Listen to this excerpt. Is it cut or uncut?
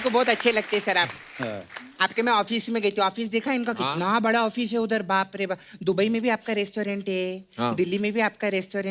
uncut